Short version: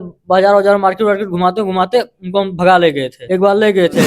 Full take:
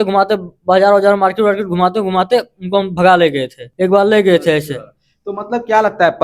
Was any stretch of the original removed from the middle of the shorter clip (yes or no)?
yes